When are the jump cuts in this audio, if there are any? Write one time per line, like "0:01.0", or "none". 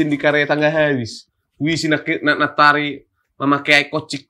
none